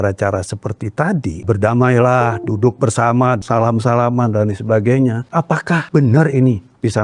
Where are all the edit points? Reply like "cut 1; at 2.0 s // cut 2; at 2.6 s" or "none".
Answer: cut 1; at 1.4 s // cut 2; at 3.4 s // cut 3; at 5.6 s

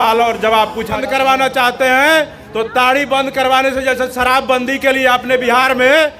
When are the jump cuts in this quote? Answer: cut 1; at 0.9 s

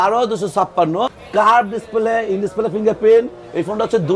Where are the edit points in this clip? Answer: cut 1; at 1.2 s

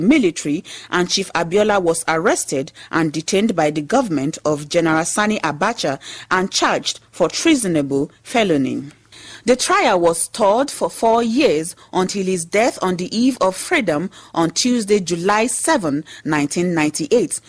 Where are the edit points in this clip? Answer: none

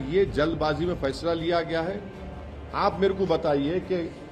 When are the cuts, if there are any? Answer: cut 1; at 2.3 s

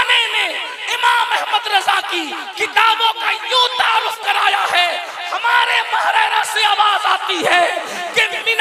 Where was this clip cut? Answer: none

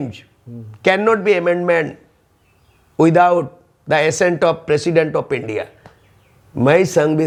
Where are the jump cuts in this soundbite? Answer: none

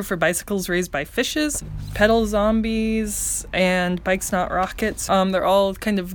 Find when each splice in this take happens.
cut 1; at 1.6 s // cut 2; at 5.0 s

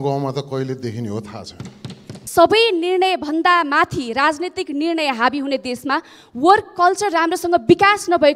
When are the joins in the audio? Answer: cut 1; at 2.2 s

